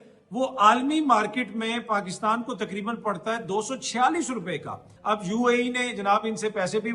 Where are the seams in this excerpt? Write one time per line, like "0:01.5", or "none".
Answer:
0:04.9